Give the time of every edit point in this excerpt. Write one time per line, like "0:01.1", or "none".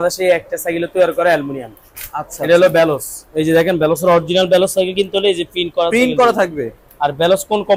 none